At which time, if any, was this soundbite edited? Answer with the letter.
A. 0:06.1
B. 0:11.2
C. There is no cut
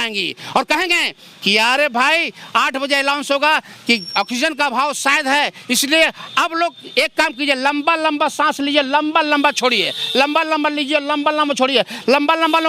C